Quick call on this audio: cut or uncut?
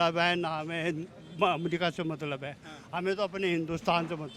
uncut